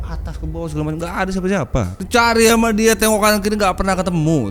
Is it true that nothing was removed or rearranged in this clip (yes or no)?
no